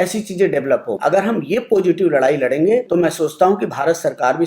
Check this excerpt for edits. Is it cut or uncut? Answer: cut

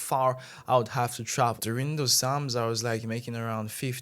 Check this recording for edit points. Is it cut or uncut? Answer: cut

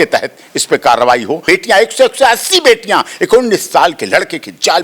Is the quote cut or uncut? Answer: cut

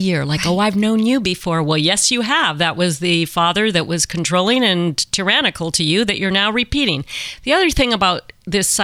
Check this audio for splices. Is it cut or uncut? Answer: uncut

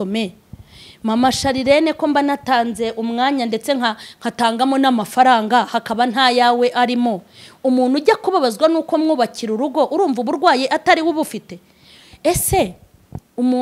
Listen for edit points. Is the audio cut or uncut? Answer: uncut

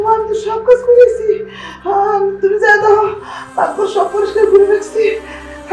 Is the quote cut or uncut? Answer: uncut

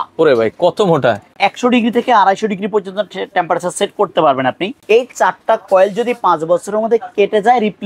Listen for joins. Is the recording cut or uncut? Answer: cut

